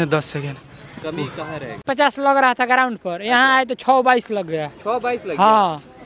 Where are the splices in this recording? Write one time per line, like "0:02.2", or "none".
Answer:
0:01.8